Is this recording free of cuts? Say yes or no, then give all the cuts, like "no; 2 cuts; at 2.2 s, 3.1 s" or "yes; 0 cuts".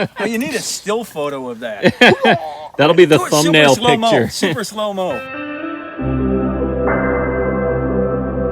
no; 1 cut; at 5.3 s